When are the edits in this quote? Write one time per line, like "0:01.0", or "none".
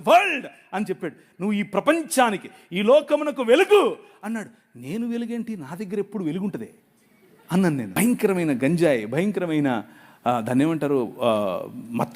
0:07.9